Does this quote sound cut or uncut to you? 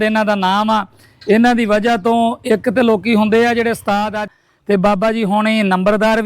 cut